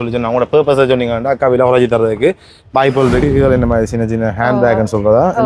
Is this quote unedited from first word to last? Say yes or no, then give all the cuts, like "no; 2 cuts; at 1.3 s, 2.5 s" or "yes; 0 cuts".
no; 1 cut; at 3.2 s